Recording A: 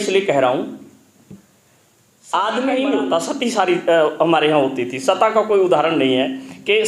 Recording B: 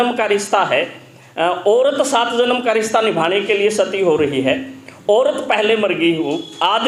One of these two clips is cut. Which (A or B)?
A